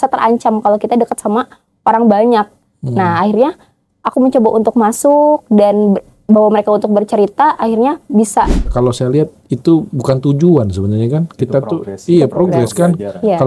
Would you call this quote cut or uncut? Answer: cut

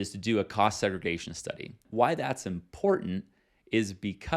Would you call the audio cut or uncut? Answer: cut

